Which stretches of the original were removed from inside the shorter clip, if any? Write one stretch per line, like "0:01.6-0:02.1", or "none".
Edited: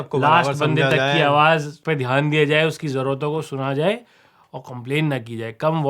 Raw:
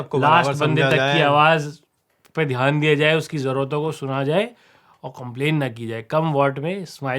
0:01.7-0:02.2